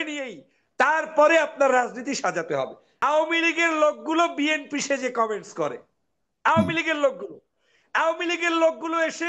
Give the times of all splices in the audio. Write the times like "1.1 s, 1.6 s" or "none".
2.8 s